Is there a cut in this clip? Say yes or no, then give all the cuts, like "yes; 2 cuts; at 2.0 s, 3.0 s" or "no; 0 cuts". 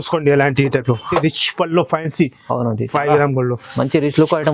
yes; 1 cut; at 1.2 s